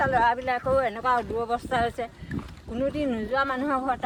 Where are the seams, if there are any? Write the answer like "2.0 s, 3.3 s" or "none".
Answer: none